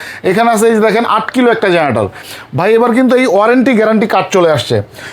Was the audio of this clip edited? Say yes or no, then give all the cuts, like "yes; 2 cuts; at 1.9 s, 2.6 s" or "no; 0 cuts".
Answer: yes; 1 cut; at 2.3 s